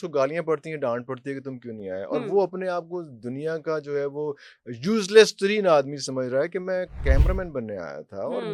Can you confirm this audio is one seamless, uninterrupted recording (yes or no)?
yes